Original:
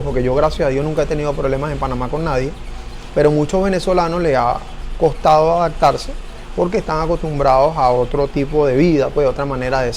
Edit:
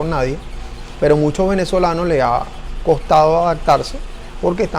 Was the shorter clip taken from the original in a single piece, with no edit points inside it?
yes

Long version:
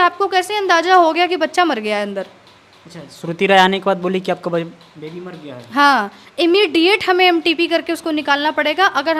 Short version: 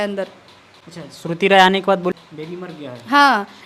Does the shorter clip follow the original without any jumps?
no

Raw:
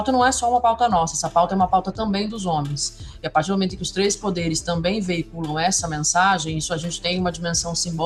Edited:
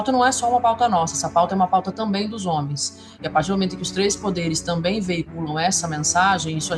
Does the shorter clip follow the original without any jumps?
yes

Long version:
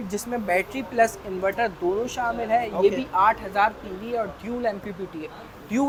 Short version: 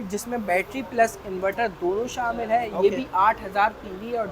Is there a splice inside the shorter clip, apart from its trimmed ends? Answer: no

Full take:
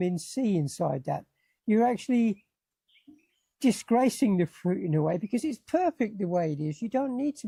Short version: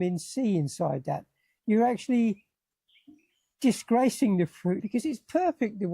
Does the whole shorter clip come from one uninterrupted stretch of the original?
no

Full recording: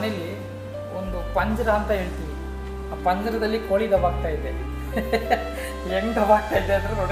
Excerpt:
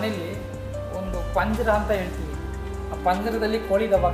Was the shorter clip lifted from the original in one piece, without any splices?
yes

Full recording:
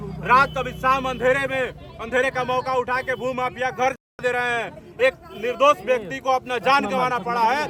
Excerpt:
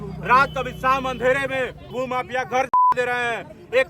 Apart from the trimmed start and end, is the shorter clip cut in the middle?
yes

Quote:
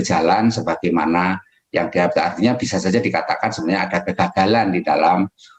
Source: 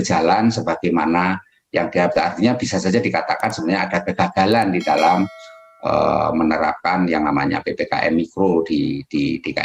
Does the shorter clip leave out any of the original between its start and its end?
no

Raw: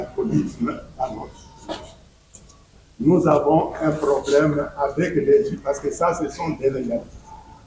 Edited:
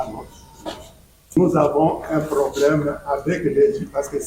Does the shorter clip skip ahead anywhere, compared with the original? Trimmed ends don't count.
yes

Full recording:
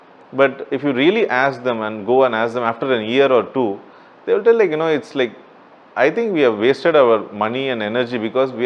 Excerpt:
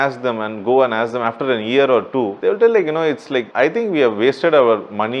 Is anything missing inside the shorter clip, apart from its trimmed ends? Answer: yes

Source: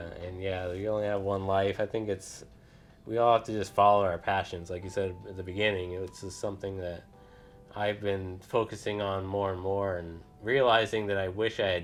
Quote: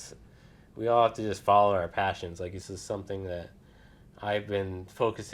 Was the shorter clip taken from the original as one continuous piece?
no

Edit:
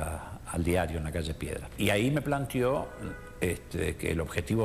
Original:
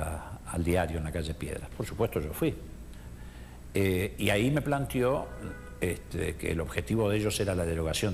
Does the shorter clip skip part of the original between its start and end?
yes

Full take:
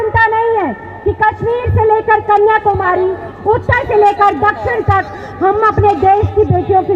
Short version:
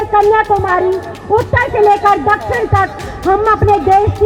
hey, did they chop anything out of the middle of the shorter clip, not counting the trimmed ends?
no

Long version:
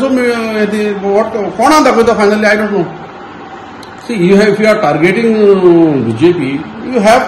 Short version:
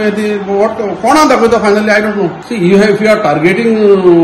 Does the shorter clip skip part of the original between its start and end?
yes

